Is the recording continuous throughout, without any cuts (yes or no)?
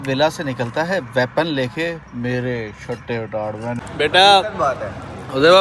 no